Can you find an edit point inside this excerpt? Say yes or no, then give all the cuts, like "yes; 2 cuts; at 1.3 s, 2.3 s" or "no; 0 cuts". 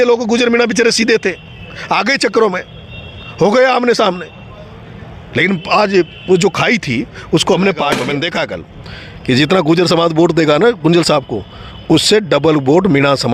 yes; 1 cut; at 8.0 s